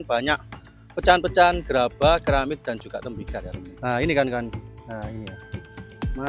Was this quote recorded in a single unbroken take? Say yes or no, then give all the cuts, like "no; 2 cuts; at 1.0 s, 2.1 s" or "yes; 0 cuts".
no; 1 cut; at 3.6 s